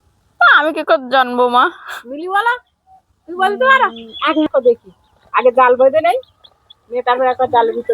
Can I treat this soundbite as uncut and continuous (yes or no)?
no